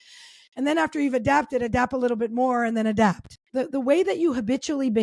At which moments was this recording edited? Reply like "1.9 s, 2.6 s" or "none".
3.3 s